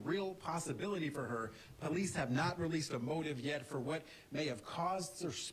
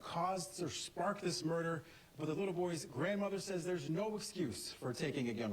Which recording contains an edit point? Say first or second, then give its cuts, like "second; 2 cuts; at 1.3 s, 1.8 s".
second; 1 cut; at 1.9 s